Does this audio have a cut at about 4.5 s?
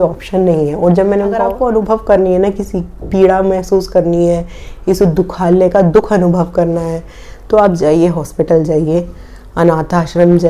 no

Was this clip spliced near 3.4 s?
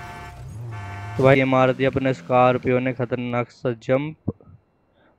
no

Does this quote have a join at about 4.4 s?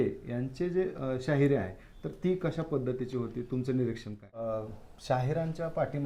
yes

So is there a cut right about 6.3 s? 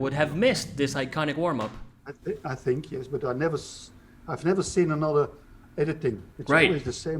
yes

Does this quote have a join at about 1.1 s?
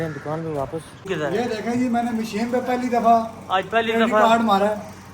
yes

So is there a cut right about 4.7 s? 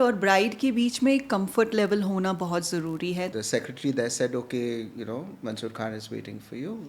no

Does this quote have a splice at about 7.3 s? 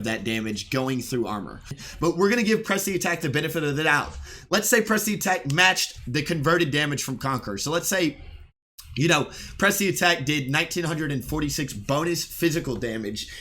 no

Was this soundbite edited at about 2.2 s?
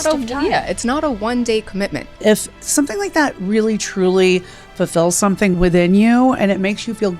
yes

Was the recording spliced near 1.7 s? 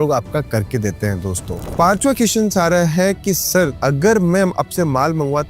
yes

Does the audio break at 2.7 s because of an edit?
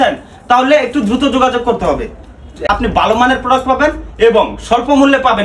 yes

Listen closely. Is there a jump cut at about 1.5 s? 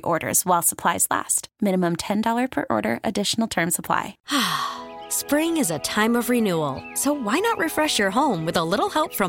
no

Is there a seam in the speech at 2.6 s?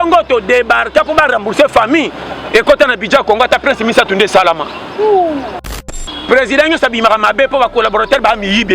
no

